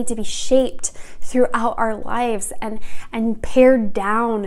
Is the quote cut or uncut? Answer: uncut